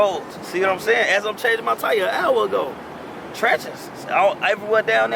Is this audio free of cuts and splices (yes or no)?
yes